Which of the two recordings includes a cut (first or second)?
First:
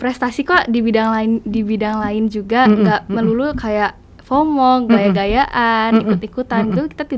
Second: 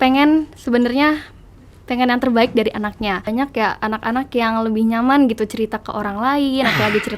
second